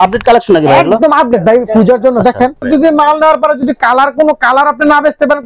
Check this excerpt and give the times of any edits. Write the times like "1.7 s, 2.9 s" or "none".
2.6 s